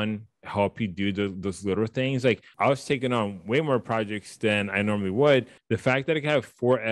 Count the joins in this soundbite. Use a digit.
2